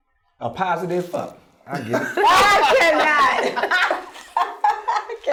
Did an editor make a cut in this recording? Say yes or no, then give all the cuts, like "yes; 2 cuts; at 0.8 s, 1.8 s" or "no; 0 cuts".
no; 0 cuts